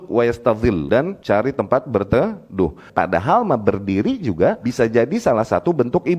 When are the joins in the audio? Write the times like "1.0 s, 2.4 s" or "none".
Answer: 1.0 s, 2.8 s, 4.6 s